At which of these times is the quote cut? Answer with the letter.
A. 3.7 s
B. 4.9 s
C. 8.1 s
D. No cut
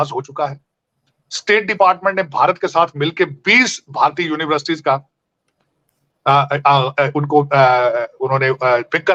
D